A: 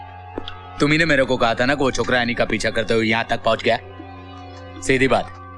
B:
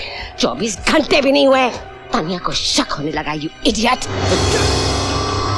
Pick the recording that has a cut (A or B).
B